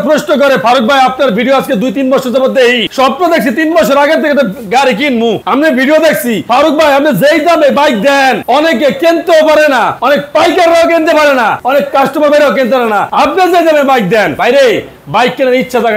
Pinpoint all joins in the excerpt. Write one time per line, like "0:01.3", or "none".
0:09.9
0:11.6
0:13.1
0:14.3